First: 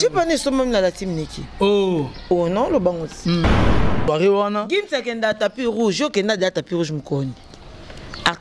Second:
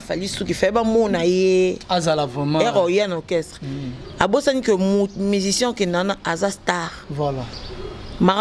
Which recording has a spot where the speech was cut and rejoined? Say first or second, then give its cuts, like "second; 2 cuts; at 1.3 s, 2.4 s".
first; 1 cut; at 3.6 s